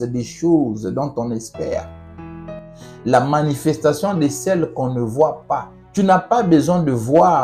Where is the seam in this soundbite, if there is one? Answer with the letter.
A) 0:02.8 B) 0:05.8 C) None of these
B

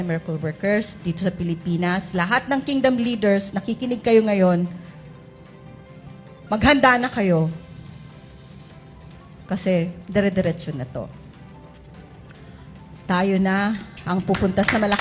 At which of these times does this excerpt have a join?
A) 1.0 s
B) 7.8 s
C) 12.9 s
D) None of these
D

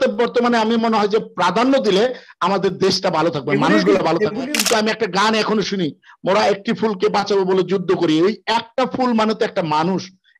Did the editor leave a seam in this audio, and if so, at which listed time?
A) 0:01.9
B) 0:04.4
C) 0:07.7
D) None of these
B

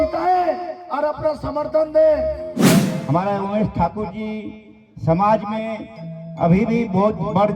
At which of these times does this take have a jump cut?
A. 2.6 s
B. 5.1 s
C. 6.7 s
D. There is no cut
A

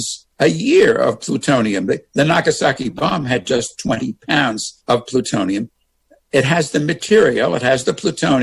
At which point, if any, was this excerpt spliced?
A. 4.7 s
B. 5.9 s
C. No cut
A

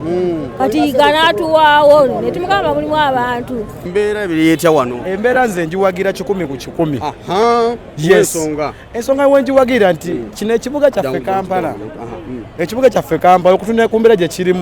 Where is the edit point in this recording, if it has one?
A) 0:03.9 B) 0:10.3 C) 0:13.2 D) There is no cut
A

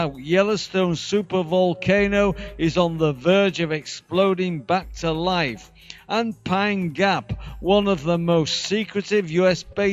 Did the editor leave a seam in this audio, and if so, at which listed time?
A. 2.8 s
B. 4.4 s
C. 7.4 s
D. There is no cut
B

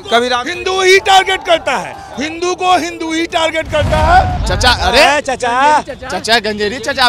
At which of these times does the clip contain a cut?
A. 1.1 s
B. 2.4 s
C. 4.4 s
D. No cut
C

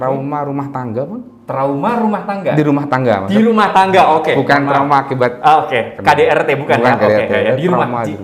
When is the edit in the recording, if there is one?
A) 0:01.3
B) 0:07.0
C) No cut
C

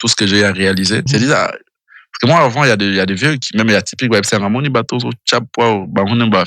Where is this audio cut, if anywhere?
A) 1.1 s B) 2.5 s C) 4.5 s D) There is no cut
A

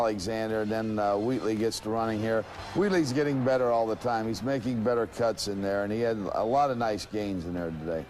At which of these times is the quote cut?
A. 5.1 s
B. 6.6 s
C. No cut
C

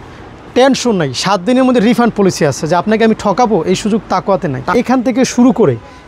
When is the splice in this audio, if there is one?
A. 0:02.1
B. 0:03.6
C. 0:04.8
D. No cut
C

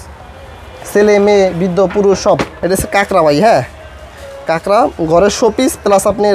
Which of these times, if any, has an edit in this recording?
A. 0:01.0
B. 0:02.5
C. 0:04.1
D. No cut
B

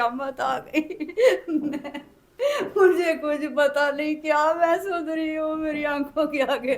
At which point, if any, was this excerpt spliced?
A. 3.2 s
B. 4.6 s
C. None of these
C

